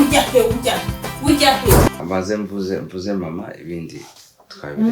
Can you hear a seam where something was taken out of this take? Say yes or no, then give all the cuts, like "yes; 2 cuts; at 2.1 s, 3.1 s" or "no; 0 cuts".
yes; 1 cut; at 2.0 s